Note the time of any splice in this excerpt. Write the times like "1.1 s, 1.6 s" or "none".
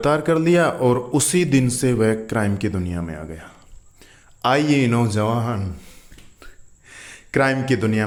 none